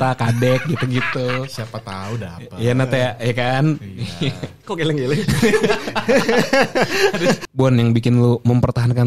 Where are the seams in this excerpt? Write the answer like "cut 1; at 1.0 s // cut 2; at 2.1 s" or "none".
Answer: cut 1; at 7.5 s